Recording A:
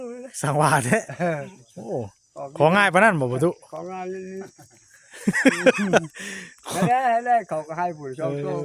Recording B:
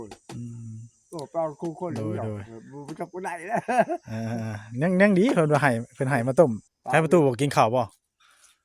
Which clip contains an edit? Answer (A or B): B